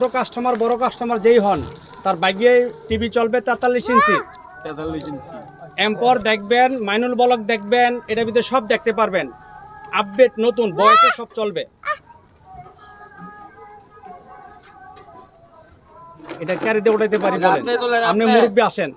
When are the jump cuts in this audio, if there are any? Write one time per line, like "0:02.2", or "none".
none